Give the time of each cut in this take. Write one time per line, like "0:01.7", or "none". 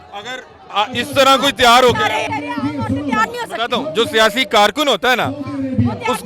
0:02.3